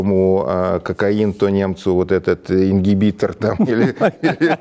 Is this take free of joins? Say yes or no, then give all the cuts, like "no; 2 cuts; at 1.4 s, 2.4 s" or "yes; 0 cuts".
yes; 0 cuts